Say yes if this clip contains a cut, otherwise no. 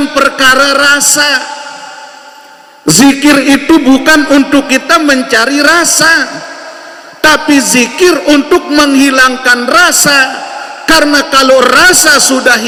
no